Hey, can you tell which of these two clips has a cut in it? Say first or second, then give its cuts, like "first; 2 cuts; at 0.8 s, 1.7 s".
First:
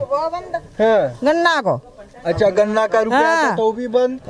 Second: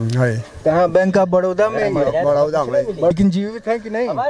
second; 1 cut; at 3.1 s